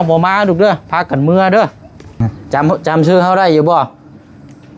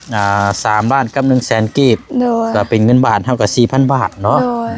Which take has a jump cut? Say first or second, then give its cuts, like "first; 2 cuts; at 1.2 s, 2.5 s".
first; 1 cut; at 2.3 s